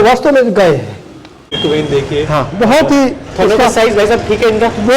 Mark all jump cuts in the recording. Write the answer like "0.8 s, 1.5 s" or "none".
1.6 s